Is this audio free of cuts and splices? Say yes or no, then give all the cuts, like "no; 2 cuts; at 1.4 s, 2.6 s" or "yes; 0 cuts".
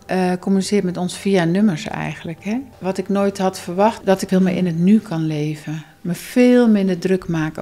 no; 2 cuts; at 2.7 s, 4.1 s